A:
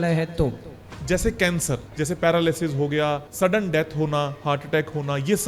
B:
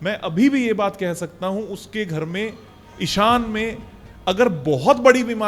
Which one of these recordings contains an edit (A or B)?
A